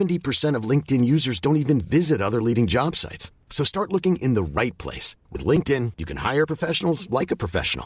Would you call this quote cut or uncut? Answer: uncut